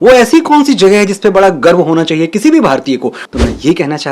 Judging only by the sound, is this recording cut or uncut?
cut